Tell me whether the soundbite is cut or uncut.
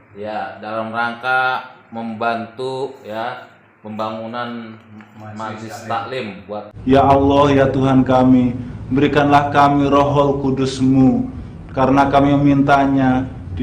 cut